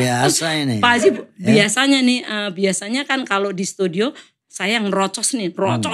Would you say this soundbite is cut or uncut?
uncut